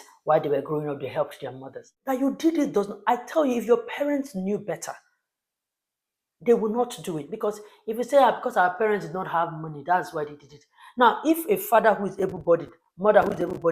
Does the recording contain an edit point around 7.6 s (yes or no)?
no